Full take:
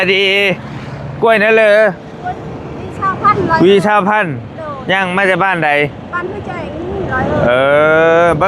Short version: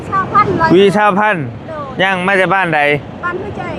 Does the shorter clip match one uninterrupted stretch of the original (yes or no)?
yes